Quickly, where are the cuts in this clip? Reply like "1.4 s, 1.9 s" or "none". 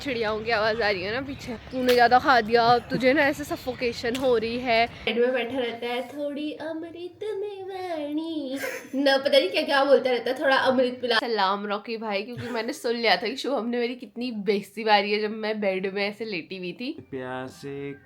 1.5 s, 5.1 s, 11.2 s, 17.0 s